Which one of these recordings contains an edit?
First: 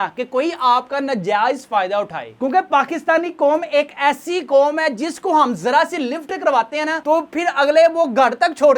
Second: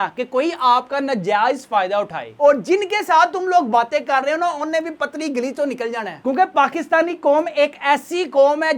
second; 2 cuts; at 2.3 s, 6.1 s

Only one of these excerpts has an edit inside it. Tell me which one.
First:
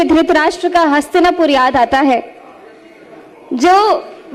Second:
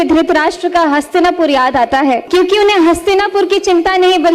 second; 1 cut; at 2.2 s

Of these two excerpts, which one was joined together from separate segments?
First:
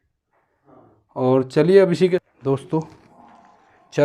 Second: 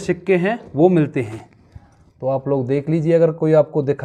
first; 1 cut; at 2.2 s

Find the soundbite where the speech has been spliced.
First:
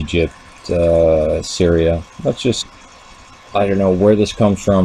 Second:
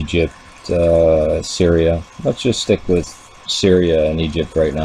second; 1 cut; at 2.6 s

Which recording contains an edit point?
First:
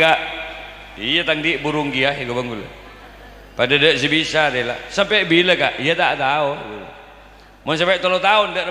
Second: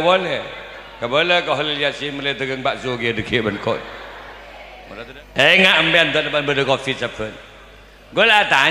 second; 1 cut; at 4.7 s

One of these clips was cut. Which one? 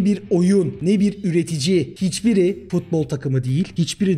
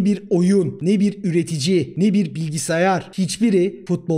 first; 1 cut; at 1.9 s

